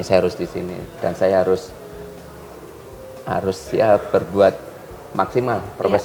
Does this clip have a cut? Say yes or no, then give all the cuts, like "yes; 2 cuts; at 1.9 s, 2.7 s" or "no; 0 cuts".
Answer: no; 0 cuts